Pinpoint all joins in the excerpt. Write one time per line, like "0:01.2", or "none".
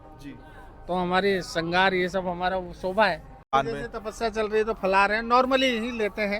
0:03.5